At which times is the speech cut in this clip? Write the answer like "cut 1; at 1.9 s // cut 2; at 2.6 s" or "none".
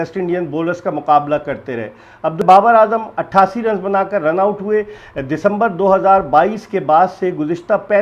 cut 1; at 2.4 s